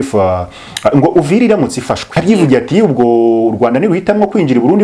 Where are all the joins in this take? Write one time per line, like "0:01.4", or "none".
0:02.1